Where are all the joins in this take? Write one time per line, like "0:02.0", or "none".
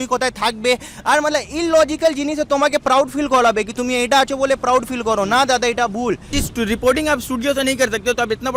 0:06.4